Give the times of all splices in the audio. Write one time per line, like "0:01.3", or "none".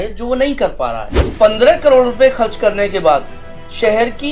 0:01.2